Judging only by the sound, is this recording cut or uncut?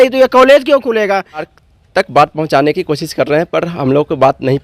cut